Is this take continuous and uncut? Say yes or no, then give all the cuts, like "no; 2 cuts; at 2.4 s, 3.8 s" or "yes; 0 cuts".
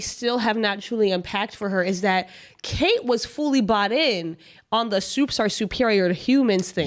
yes; 0 cuts